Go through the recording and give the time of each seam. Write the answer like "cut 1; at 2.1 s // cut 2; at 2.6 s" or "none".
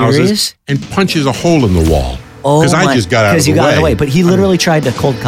none